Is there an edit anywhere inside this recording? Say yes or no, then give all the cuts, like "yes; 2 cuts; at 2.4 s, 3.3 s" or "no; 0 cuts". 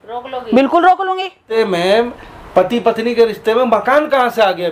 yes; 1 cut; at 1.4 s